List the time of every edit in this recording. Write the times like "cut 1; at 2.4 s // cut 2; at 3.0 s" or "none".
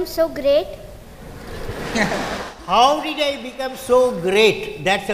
none